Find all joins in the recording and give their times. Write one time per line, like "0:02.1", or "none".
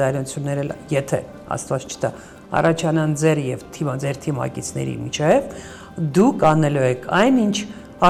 none

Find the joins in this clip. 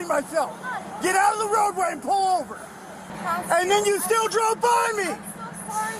0:03.1

